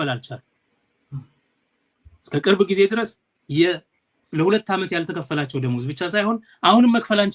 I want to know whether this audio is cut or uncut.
uncut